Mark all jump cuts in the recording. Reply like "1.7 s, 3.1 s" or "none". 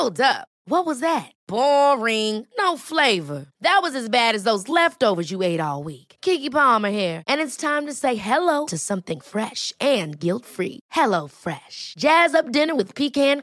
none